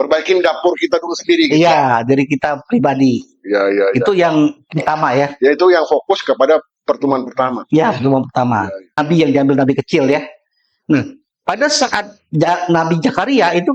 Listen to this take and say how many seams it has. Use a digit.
1